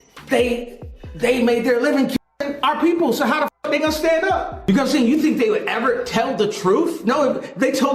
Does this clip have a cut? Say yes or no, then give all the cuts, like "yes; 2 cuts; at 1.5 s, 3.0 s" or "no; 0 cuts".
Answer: yes; 1 cut; at 4.6 s